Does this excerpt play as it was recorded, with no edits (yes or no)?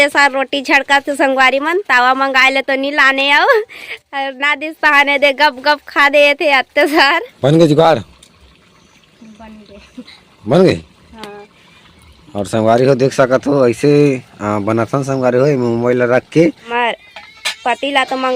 no